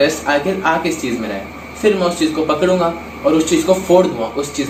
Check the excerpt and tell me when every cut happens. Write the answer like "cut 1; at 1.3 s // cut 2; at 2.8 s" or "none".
none